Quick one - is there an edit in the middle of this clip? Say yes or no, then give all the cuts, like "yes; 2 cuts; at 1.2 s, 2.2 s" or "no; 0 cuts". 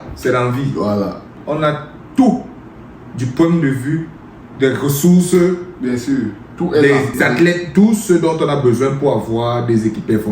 yes; 2 cuts; at 1.3 s, 7.1 s